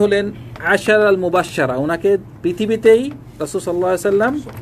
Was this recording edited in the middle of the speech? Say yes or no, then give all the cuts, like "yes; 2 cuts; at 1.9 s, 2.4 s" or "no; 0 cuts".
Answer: no; 0 cuts